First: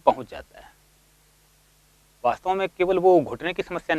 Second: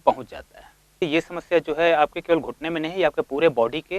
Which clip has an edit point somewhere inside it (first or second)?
second